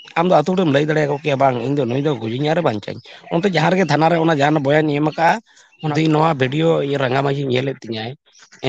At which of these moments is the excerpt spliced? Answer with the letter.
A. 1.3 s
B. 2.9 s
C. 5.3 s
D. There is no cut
C